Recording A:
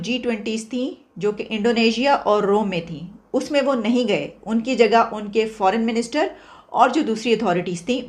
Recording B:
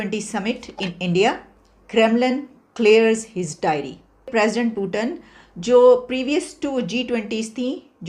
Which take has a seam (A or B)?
B